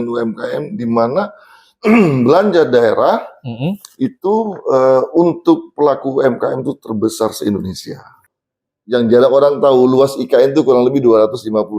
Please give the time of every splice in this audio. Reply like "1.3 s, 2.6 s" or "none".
8.2 s